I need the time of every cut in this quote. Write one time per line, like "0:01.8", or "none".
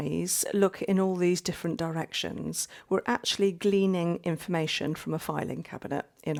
none

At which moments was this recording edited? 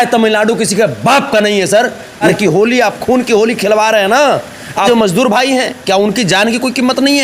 0:02.3
0:04.9

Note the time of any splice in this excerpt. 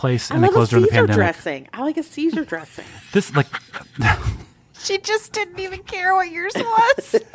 none

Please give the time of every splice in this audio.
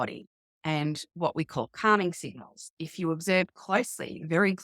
0:02.7

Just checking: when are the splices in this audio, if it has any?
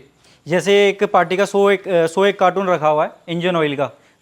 none

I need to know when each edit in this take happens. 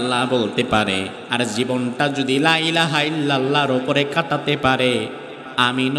0:01.2

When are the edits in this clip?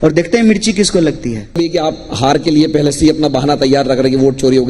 0:01.6

